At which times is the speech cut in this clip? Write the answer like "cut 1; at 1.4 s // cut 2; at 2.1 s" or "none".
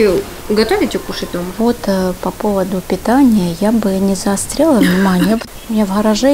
cut 1; at 1.4 s // cut 2; at 5.4 s